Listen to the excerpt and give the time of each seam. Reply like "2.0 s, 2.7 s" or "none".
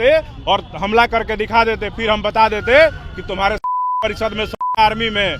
none

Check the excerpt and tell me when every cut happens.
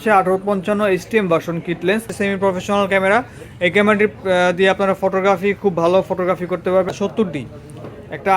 2.1 s, 6.9 s

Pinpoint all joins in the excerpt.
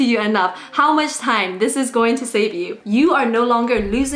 2.7 s

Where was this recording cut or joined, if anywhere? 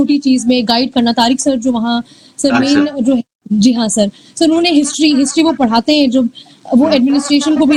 none

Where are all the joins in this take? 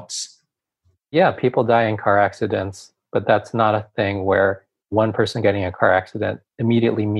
1.1 s

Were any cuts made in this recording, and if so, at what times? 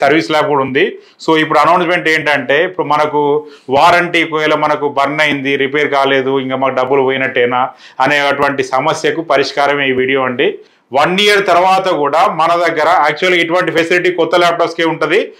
10.7 s

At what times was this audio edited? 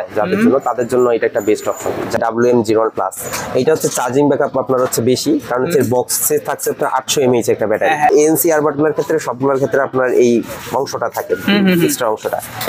2.2 s, 8.1 s

